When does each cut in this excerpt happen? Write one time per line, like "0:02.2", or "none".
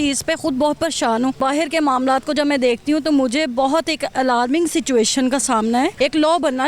0:01.4
0:05.9